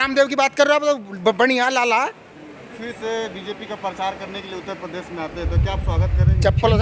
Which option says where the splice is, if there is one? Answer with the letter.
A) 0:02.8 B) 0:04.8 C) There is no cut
A